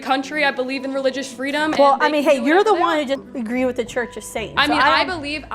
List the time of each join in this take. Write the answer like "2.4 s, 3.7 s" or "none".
3.2 s

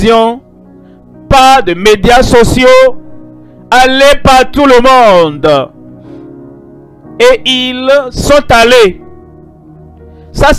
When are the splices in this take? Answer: none

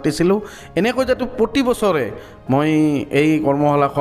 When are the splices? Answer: none

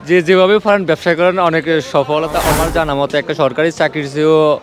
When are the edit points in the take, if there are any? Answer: 2.4 s

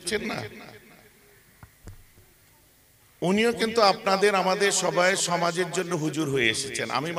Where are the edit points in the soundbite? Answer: none

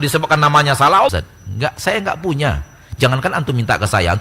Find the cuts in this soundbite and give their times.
1.1 s

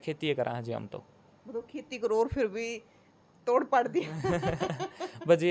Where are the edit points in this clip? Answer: none

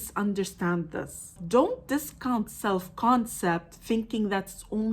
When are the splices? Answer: 1.4 s

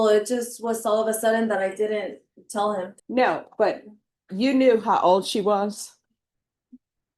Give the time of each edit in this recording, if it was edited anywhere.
3.0 s

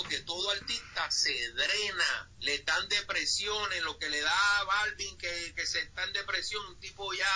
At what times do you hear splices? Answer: 2.3 s

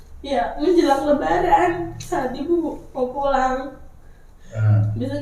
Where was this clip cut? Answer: none

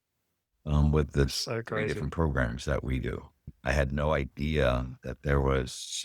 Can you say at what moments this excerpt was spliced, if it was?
3.5 s

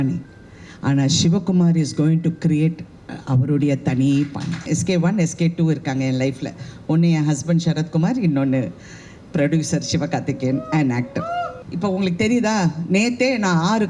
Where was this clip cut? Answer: 4.7 s, 11.6 s

